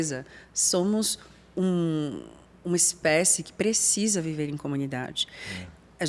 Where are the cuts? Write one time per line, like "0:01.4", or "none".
none